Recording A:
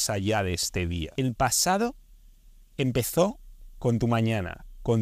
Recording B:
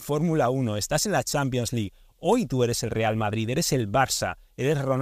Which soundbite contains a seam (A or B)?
A